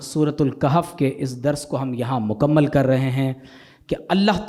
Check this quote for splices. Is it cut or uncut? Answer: uncut